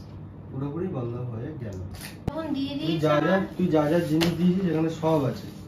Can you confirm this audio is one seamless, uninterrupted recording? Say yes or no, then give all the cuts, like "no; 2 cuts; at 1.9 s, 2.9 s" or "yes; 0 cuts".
no; 1 cut; at 2.3 s